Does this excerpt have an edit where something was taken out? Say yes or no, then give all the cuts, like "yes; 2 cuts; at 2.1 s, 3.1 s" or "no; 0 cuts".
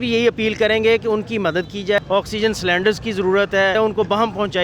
yes; 2 cuts; at 2.0 s, 3.7 s